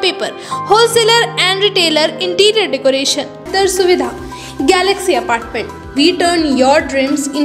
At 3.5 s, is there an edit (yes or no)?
yes